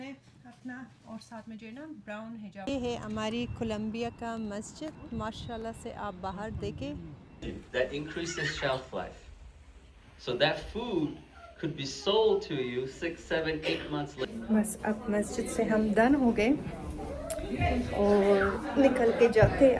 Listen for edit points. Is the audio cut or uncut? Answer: cut